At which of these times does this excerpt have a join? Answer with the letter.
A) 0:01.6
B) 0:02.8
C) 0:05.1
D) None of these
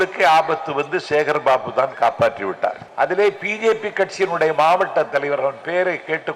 B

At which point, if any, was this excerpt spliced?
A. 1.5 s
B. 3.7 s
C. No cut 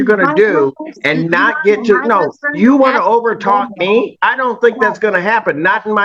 C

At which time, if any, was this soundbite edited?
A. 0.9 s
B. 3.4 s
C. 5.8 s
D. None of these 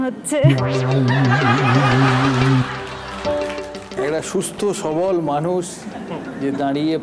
B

